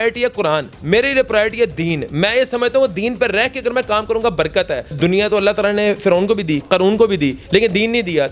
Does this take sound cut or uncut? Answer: cut